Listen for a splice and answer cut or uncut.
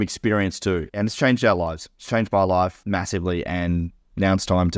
cut